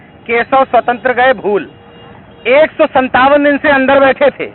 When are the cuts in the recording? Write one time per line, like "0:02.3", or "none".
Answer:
none